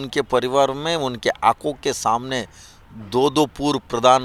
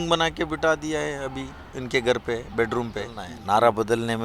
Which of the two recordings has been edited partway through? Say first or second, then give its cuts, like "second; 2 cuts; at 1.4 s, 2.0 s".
second; 1 cut; at 3.3 s